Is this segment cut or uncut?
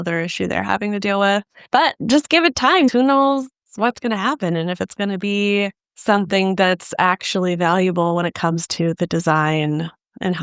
cut